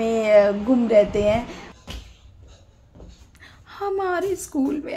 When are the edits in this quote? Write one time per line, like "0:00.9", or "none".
0:01.6